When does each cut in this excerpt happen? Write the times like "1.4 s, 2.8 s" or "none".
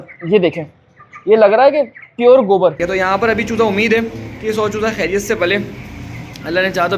2.8 s